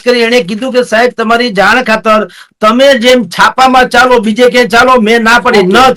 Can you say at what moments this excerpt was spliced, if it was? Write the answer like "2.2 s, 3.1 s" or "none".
none